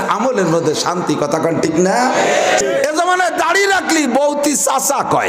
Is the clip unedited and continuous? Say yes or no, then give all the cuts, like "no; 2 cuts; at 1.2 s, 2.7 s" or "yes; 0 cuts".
no; 1 cut; at 2.6 s